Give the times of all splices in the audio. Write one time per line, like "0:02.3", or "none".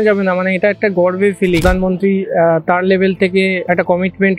0:01.6
0:03.6